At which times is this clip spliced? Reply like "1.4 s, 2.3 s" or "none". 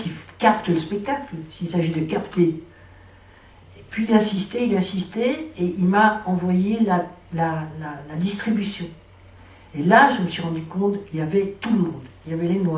9.2 s